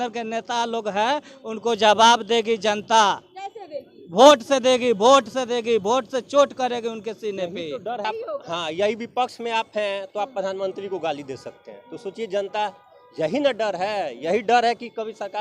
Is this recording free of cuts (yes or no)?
no